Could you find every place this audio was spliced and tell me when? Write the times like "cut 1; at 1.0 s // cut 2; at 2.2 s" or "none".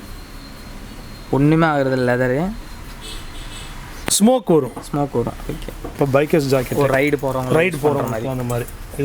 cut 1; at 5.9 s